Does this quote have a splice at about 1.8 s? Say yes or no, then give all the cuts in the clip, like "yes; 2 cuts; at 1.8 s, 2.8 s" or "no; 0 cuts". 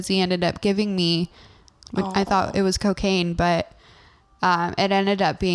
yes; 1 cut; at 1.8 s